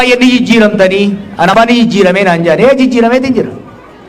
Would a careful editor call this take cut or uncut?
cut